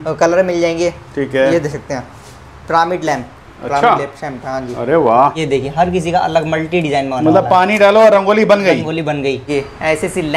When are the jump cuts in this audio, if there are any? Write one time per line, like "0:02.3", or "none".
0:05.4
0:09.5